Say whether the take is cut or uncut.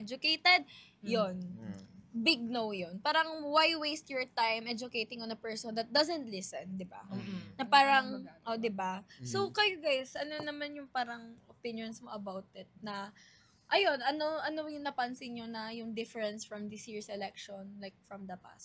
uncut